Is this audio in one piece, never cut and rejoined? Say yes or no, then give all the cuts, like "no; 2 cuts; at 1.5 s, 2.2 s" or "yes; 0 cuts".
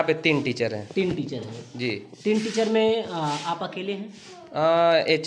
yes; 0 cuts